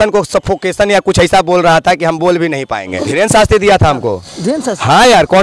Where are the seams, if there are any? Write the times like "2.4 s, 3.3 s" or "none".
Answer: 3.0 s